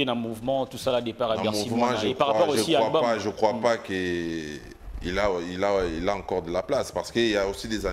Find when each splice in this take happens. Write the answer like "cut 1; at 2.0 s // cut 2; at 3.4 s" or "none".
none